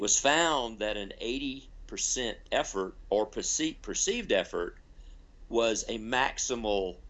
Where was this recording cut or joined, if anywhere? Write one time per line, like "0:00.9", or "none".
none